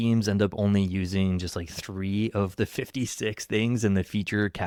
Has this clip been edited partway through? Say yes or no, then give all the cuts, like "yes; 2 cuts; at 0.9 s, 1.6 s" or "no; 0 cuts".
no; 0 cuts